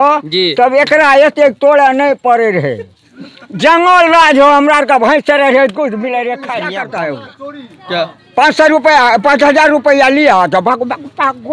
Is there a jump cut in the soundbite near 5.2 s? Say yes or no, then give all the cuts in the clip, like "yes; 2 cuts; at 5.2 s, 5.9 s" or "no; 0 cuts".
no; 1 cut; at 6.9 s